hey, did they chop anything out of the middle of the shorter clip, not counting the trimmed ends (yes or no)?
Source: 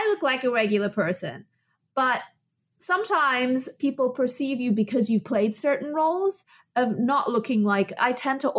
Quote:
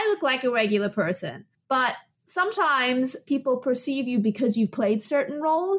yes